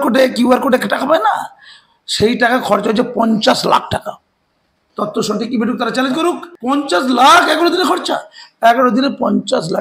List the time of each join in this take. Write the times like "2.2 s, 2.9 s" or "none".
6.5 s